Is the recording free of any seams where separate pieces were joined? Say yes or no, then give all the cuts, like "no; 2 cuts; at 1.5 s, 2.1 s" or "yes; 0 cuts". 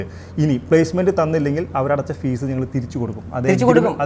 yes; 0 cuts